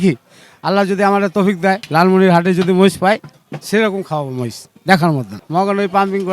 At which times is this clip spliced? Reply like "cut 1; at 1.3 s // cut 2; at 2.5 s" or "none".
cut 1; at 1.8 s // cut 2; at 5.4 s